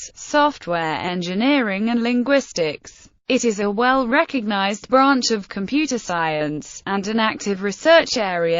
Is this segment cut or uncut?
cut